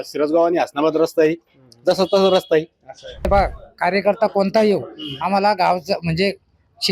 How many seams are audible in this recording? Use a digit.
1